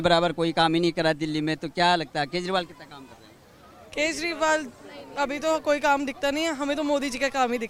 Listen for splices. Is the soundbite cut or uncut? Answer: uncut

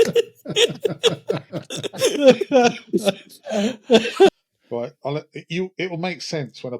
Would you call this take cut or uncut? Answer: cut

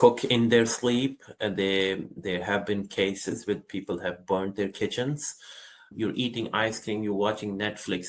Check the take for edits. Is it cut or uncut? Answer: cut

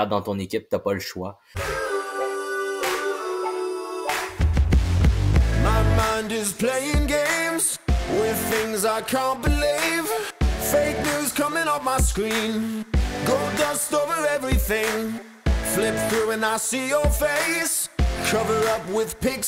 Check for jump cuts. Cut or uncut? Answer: cut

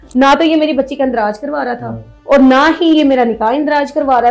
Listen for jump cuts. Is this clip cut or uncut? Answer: uncut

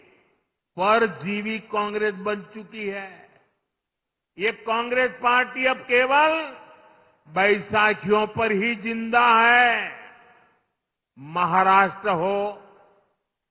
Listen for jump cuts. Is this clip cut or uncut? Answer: uncut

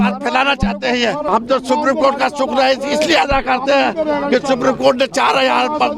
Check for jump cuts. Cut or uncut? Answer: cut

